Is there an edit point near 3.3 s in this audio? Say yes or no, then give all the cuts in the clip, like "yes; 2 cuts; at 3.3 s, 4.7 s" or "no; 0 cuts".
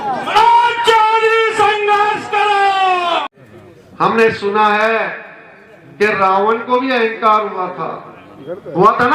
yes; 1 cut; at 3.3 s